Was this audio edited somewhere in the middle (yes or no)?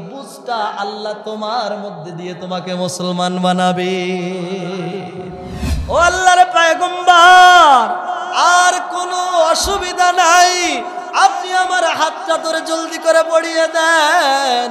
yes